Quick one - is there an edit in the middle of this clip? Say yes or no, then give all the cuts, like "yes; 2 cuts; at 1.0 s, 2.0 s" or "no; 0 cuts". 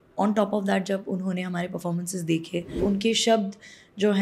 yes; 1 cut; at 2.8 s